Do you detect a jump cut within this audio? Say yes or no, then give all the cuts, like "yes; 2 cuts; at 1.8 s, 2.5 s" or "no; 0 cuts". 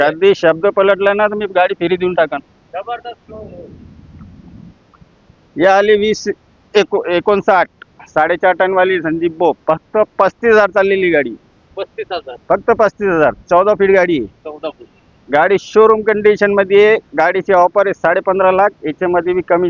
no; 0 cuts